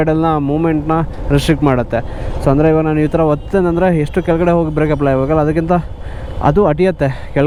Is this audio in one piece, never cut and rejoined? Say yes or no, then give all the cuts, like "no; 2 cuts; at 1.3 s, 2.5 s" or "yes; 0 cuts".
yes; 0 cuts